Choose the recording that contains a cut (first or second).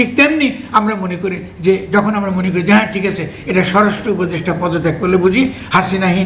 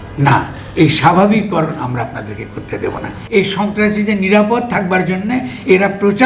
second